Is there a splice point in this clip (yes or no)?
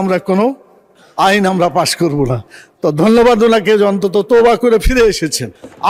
no